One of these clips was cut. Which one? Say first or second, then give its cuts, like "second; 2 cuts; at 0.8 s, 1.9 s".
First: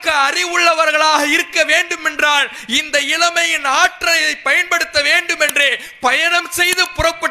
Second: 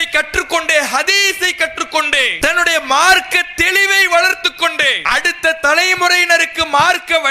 second; 2 cuts; at 2.3 s, 5.0 s